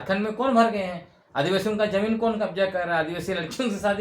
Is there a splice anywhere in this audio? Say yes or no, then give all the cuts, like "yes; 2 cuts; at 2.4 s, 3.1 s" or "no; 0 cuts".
no; 0 cuts